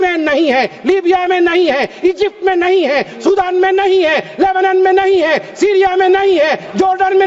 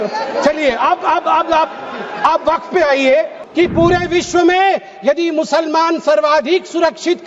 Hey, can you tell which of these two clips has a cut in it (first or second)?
second